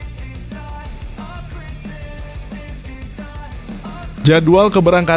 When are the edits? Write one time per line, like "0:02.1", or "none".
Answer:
0:04.2

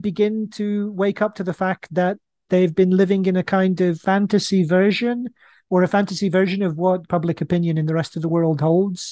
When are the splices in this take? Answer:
0:04.0
0:07.0

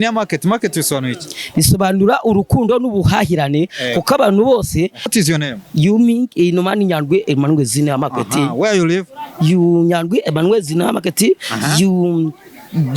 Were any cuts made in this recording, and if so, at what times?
0:05.1

